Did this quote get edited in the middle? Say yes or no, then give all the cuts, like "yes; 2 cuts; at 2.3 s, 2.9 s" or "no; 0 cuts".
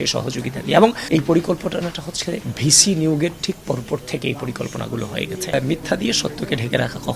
yes; 2 cuts; at 1.0 s, 5.4 s